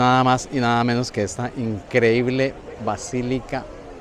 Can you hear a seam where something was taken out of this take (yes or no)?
no